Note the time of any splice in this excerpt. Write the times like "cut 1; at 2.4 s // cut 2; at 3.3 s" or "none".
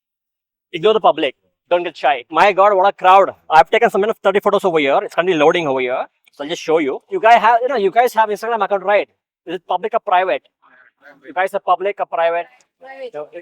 cut 1; at 2.3 s // cut 2; at 7.0 s